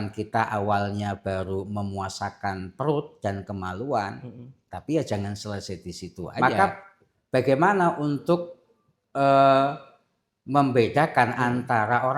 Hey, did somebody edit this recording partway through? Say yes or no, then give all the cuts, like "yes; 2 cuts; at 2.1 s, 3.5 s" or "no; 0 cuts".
yes; 1 cut; at 6.3 s